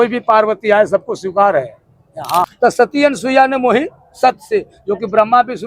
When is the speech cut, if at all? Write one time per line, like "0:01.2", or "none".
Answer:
0:02.5